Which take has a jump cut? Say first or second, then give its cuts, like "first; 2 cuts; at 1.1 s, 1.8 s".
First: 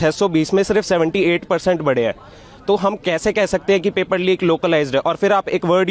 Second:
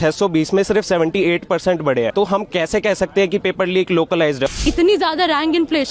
second; 2 cuts; at 2.1 s, 4.6 s